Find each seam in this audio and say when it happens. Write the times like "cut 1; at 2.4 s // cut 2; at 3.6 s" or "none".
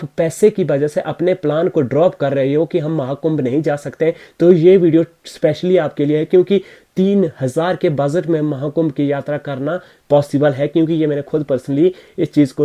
none